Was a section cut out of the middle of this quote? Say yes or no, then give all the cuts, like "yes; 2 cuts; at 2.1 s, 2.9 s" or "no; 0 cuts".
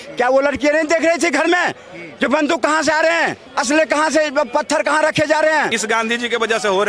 yes; 2 cuts; at 3.5 s, 5.8 s